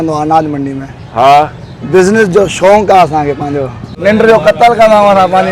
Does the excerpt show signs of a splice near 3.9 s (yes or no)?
yes